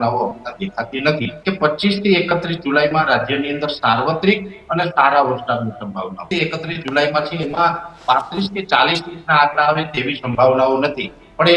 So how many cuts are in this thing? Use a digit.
2